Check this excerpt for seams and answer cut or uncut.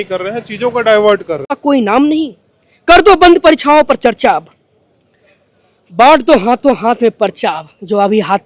cut